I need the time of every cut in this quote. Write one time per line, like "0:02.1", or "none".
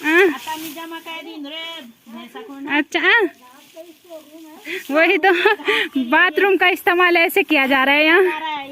none